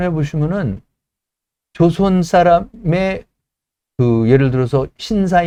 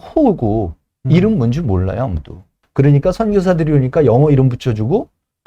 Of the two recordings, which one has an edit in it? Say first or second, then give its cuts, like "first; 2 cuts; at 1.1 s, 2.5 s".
second; 1 cut; at 2.6 s